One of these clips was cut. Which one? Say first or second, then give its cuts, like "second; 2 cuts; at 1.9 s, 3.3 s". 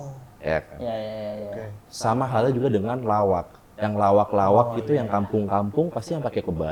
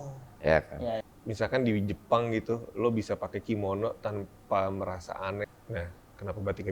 second; 2 cuts; at 1.0 s, 5.5 s